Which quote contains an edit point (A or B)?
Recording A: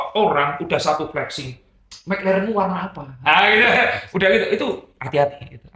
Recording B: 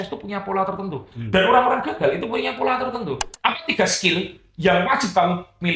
B